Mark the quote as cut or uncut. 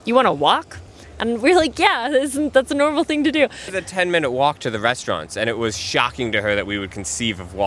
uncut